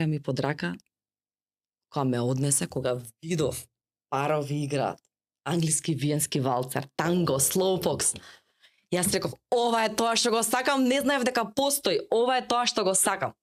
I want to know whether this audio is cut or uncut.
uncut